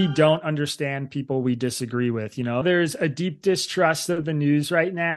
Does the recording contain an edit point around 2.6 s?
yes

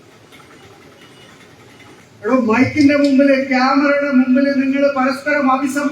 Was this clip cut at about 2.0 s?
yes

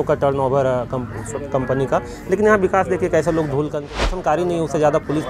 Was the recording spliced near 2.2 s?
no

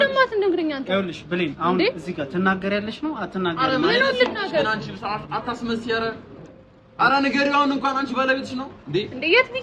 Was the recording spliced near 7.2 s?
no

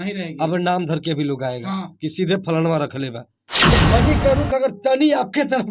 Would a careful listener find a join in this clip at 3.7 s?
yes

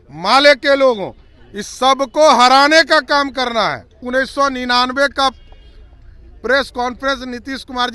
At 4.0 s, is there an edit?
yes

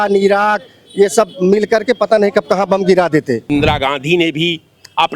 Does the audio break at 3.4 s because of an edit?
yes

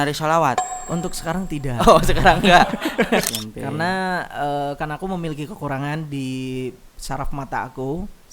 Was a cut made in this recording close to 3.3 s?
yes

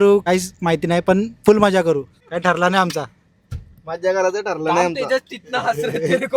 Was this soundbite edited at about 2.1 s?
no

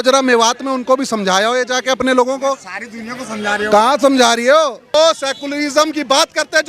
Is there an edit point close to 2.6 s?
no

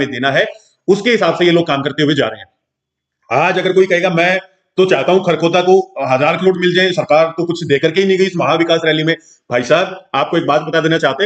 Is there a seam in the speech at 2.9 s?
no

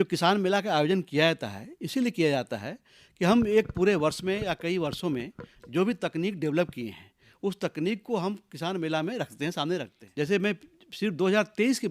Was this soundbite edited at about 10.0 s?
yes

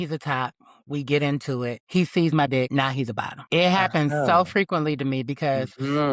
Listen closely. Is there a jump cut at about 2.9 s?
yes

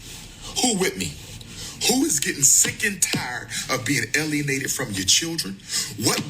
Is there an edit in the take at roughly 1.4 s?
yes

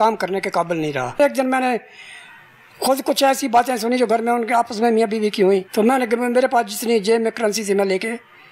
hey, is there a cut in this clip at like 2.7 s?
no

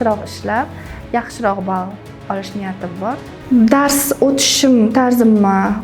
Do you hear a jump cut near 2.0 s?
no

